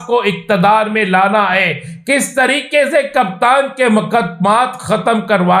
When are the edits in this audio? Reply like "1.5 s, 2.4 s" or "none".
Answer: none